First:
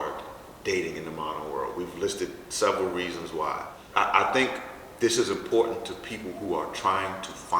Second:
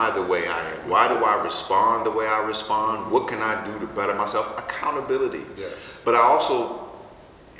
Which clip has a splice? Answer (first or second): first